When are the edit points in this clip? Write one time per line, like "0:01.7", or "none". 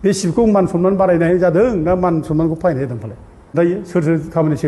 0:03.5